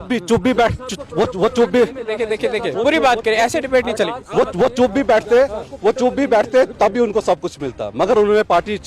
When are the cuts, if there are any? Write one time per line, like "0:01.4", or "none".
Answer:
none